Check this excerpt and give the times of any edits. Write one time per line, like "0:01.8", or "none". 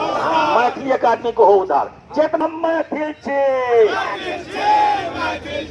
0:02.4